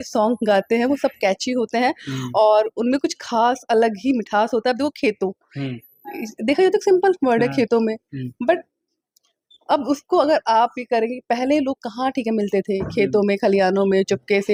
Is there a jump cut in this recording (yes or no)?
no